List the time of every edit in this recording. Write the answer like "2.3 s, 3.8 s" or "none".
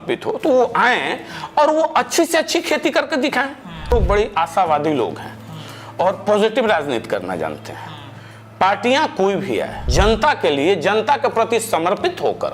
3.9 s, 9.8 s